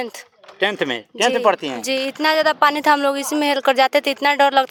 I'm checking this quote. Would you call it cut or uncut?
uncut